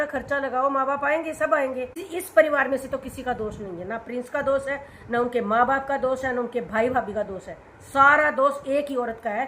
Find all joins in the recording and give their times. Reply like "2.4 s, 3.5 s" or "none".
2.0 s